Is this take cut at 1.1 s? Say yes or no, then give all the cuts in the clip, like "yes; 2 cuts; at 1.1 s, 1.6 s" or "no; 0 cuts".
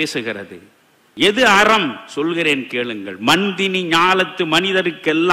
yes; 1 cut; at 1.1 s